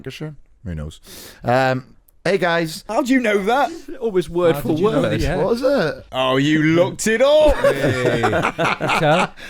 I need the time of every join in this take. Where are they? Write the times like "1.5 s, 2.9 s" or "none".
2.9 s, 3.8 s, 6.0 s